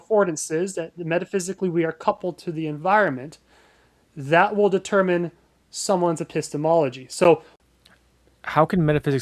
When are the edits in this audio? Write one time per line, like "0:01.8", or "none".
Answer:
0:07.5